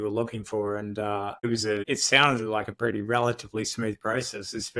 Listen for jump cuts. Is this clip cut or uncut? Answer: cut